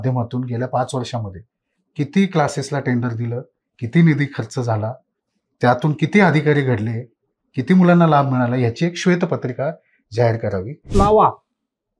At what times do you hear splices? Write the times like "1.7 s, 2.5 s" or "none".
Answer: 10.9 s